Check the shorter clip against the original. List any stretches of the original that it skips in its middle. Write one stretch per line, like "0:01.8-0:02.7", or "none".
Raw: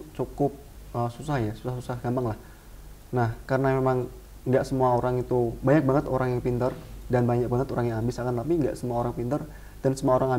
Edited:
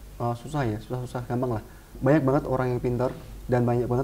0:02.7-0:05.6